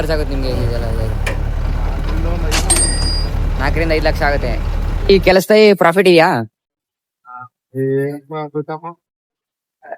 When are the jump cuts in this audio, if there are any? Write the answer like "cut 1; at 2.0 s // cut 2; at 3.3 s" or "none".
cut 1; at 4.9 s